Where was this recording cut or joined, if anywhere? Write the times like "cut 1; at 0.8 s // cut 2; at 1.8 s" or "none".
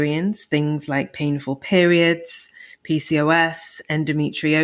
none

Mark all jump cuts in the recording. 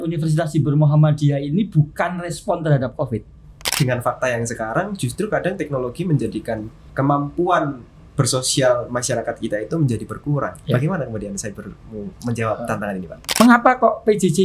cut 1; at 3.8 s // cut 2; at 6.8 s // cut 3; at 13.4 s

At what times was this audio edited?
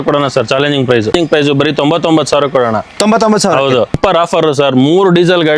cut 1; at 1.1 s // cut 2; at 4.0 s

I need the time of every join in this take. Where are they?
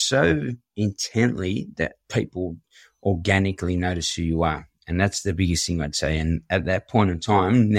none

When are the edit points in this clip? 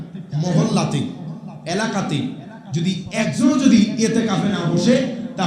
cut 1; at 3.1 s

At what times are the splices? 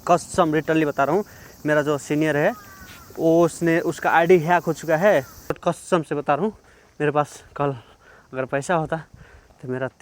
cut 1; at 5.6 s

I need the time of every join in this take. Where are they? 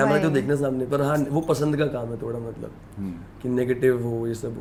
none

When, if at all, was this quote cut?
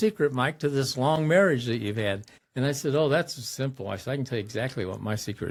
none

